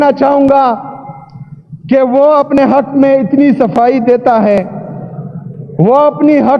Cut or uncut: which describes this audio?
uncut